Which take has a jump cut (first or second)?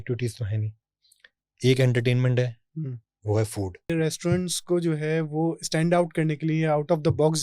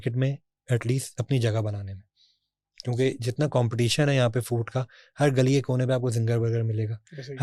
first